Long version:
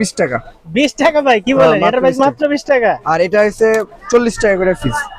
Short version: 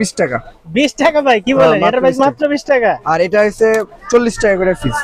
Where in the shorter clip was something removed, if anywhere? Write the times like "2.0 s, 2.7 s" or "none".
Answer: none